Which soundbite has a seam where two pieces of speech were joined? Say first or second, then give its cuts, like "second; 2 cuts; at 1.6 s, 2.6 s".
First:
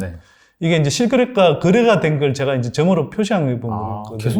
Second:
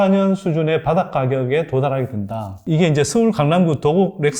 second; 1 cut; at 2.6 s